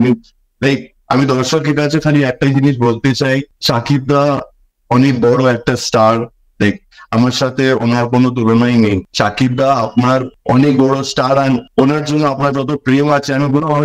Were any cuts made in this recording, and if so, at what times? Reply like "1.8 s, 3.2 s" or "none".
9.1 s